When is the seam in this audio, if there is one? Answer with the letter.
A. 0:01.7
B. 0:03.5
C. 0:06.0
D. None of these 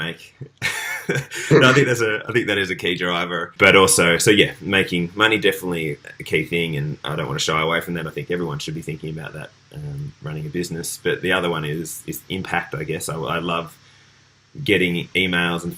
B